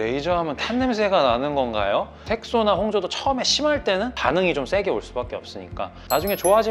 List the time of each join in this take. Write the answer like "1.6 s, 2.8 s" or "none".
2.2 s